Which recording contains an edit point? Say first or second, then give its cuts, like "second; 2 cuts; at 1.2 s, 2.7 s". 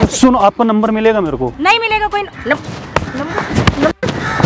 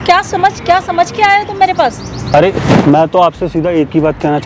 second; 1 cut; at 2.3 s